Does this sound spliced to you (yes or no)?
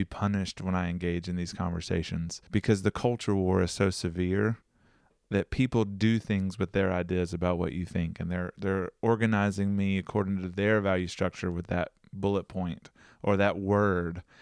yes